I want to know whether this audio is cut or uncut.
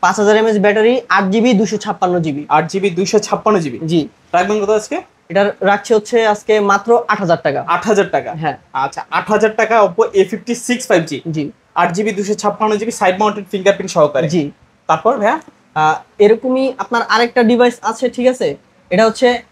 uncut